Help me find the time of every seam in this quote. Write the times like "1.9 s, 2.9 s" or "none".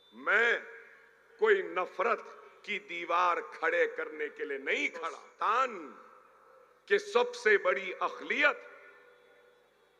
5.2 s